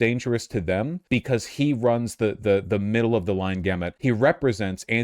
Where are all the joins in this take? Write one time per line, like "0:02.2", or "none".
0:01.0
0:03.9